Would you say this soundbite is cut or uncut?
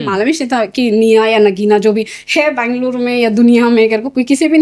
uncut